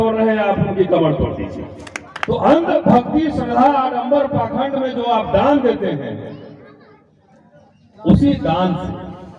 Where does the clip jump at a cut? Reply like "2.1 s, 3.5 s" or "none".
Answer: 2.2 s